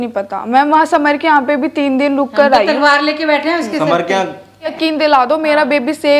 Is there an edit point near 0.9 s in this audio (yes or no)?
no